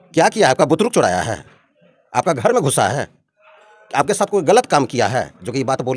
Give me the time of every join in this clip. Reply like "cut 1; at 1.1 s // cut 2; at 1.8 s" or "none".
none